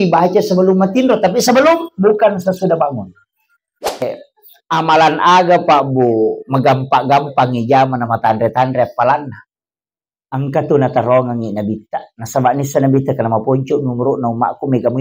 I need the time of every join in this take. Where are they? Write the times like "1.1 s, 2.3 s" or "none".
4.0 s